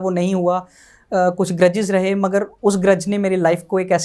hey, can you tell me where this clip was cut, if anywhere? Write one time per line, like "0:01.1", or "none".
none